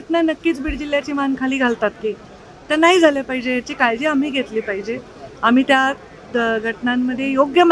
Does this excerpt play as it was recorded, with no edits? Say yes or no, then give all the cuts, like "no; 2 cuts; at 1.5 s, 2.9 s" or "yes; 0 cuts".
yes; 0 cuts